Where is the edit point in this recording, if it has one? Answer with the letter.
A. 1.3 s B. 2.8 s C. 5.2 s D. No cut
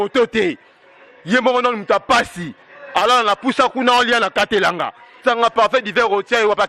C